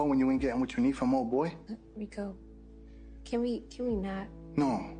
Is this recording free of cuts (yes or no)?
no